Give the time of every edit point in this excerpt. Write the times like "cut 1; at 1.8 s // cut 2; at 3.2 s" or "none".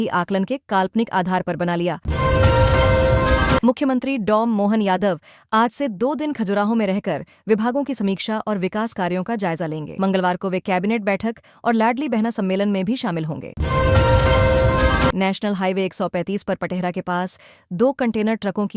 cut 1; at 2.1 s // cut 2; at 3.6 s // cut 3; at 13.6 s // cut 4; at 15.1 s